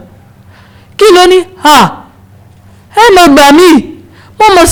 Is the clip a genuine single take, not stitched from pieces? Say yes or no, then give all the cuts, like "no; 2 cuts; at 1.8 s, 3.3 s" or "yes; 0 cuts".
yes; 0 cuts